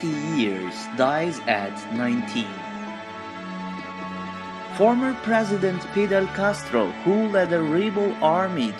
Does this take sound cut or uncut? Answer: cut